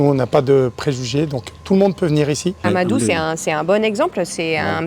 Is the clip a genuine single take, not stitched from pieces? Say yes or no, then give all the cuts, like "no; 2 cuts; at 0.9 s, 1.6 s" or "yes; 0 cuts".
no; 1 cut; at 2.6 s